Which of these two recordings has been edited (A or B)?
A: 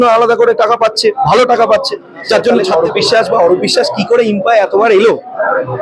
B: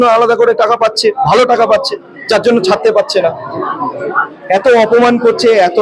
A